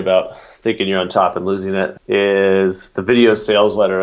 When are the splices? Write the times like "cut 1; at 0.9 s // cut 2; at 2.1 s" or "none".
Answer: cut 1; at 2.0 s